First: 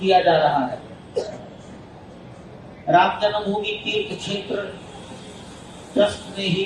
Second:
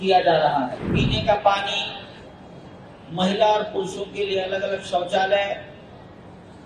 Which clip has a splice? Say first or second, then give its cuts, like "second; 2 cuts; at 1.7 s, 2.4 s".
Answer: second; 1 cut; at 1.0 s